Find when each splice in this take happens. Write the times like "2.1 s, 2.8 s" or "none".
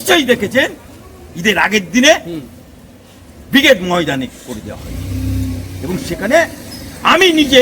none